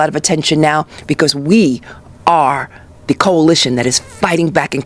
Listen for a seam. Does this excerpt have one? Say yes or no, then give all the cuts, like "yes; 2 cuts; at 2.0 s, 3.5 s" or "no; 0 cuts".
no; 0 cuts